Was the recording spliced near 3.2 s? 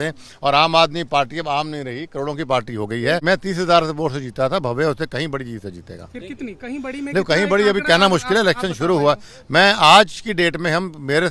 yes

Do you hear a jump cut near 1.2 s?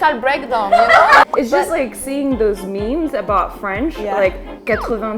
yes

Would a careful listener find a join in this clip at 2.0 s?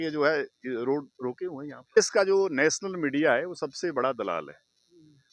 yes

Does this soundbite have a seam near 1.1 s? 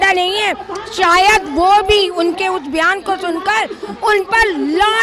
no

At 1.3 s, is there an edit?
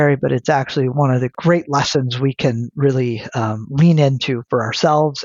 yes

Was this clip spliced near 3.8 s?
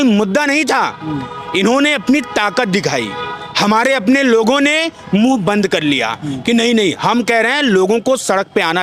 no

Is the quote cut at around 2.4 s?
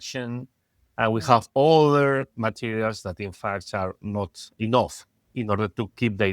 no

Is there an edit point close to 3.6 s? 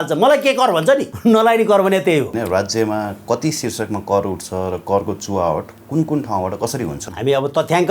no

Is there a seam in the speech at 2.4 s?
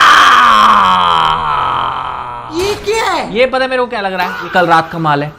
yes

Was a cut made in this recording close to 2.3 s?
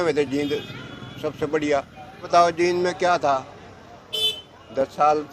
yes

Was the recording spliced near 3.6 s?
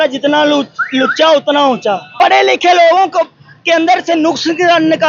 no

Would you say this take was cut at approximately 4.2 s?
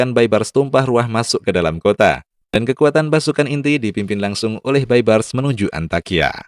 no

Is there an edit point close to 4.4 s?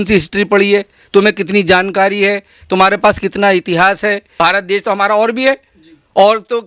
yes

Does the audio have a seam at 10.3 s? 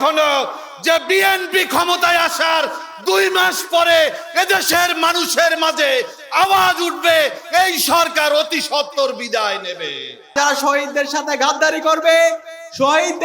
yes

